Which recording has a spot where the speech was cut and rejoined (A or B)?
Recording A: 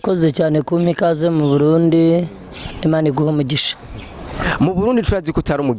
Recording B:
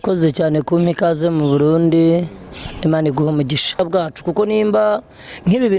B